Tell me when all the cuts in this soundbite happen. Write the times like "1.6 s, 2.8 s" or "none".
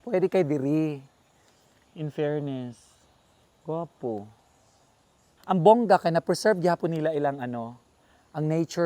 none

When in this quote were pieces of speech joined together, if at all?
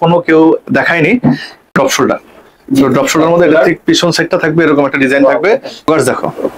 1.8 s, 5.9 s

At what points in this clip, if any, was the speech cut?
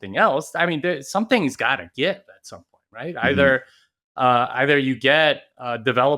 none

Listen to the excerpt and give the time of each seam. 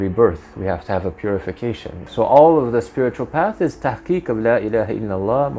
2.0 s

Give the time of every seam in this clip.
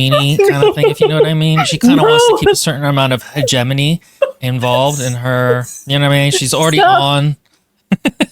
none

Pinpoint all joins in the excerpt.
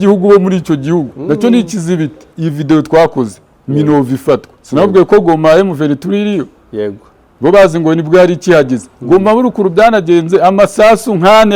2.2 s

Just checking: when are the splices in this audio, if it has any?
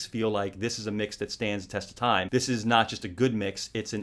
none

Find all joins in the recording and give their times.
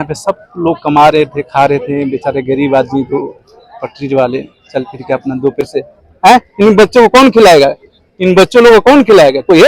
5.7 s

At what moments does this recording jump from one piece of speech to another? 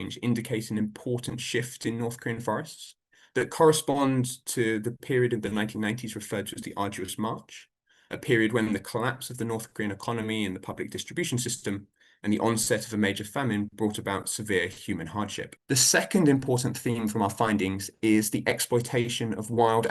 15.5 s

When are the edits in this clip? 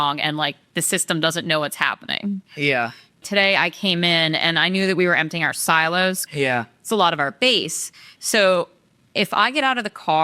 3.2 s, 6.2 s

